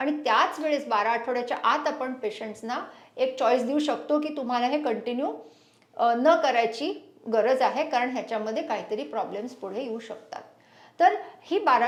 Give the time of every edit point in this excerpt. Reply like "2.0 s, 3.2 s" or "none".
none